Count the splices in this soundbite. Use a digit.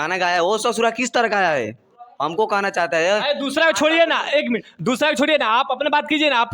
0